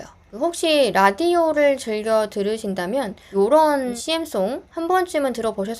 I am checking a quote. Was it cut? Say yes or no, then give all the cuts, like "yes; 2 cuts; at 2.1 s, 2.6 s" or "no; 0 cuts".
yes; 2 cuts; at 3.2 s, 4.0 s